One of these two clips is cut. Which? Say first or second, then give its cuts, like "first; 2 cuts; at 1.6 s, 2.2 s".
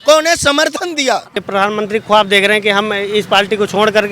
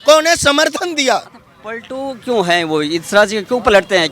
first; 1 cut; at 1.4 s